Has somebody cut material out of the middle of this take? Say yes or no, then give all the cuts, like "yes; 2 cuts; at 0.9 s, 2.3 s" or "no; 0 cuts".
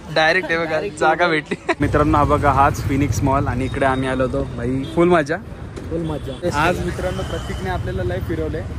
yes; 2 cuts; at 1.8 s, 6.4 s